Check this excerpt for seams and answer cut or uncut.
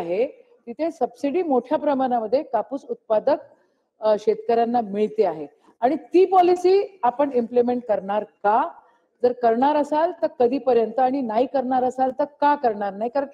uncut